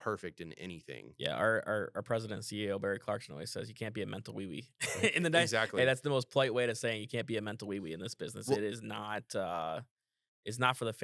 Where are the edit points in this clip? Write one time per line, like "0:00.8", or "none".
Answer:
none

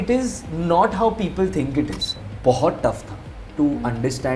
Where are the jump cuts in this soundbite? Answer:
0:02.2

